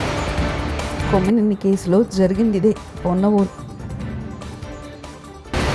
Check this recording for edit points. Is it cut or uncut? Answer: uncut